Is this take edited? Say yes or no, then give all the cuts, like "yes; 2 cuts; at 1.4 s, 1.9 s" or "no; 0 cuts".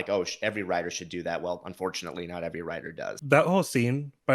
yes; 1 cut; at 3.1 s